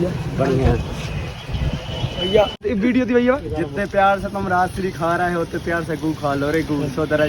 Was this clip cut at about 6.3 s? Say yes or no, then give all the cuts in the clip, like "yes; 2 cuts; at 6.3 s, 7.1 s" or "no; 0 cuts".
no; 1 cut; at 2.6 s